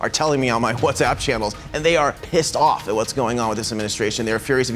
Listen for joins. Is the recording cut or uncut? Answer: cut